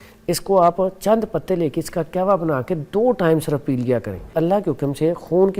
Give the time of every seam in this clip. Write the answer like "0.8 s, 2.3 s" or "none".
4.3 s